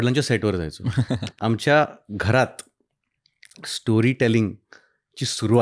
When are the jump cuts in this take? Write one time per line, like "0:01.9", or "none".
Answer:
0:01.2